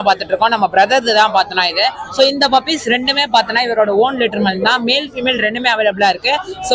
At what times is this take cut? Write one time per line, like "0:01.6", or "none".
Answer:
none